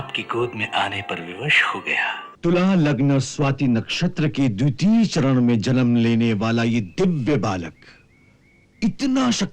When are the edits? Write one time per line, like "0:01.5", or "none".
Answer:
0:02.3